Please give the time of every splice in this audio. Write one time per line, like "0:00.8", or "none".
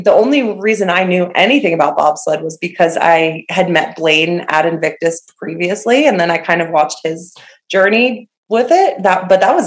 none